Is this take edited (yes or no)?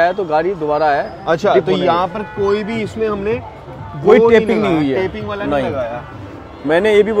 no